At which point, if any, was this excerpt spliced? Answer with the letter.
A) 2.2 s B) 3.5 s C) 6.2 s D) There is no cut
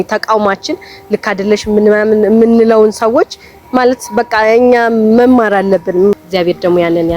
C